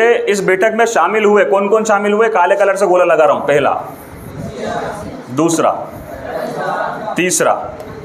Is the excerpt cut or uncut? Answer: uncut